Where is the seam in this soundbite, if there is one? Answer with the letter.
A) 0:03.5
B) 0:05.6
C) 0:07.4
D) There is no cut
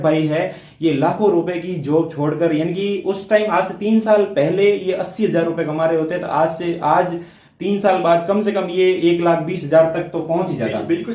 D